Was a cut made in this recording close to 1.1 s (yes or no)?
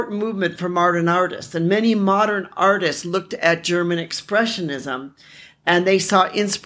no